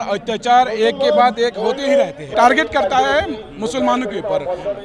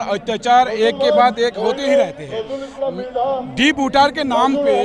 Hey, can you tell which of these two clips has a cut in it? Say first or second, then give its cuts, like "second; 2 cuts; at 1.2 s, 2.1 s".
first; 1 cut; at 2.3 s